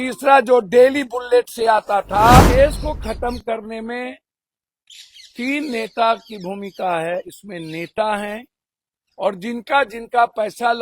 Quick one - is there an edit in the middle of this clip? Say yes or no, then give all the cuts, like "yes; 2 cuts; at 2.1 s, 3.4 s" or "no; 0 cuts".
yes; 1 cut; at 2.4 s